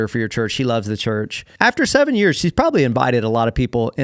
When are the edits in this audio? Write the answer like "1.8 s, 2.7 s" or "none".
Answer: 1.4 s